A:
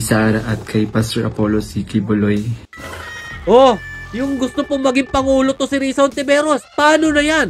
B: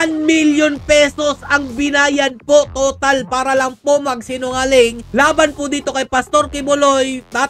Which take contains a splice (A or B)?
A